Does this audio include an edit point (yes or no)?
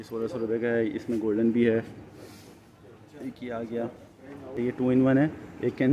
yes